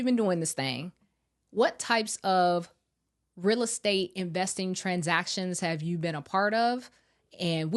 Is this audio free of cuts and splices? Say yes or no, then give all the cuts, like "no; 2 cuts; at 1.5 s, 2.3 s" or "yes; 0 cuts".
yes; 0 cuts